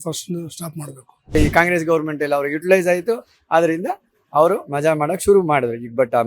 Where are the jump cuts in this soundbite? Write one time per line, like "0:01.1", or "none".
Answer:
0:01.4

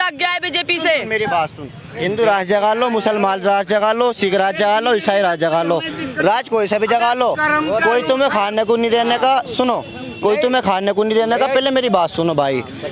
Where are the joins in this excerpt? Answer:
none

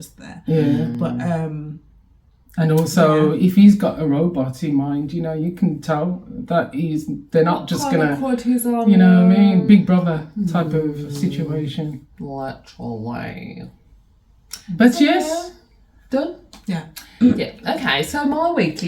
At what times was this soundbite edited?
none

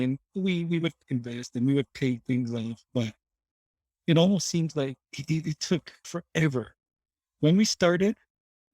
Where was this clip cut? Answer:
0:01.0
0:06.1

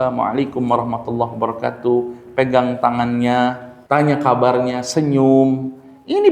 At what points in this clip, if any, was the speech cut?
0:03.7

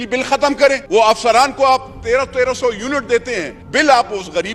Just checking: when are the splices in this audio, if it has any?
0:00.8
0:03.6

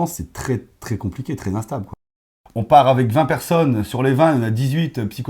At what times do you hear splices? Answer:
0:02.1

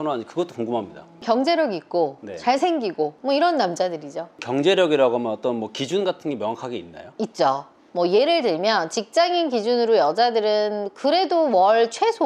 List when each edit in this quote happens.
0:01.2
0:03.2
0:04.4

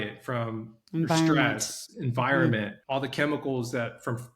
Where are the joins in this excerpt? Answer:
0:02.8

